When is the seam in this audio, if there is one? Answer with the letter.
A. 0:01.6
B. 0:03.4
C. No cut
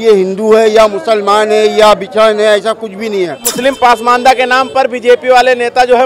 B